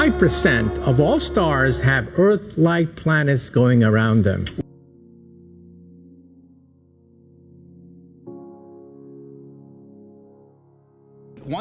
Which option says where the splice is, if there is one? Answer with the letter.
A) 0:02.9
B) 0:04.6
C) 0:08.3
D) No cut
B